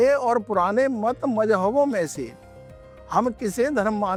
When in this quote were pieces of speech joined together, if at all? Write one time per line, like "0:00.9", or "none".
none